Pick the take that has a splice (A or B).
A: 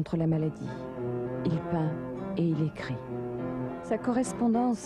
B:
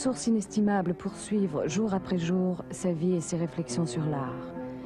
B